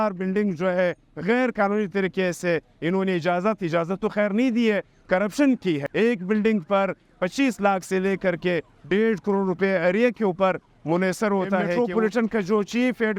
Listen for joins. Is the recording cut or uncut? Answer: cut